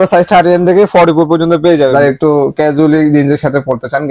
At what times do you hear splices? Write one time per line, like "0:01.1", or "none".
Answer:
0:01.9